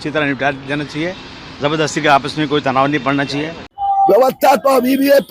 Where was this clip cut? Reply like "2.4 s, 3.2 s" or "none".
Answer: 3.6 s